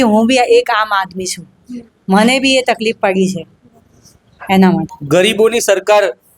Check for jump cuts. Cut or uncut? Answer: cut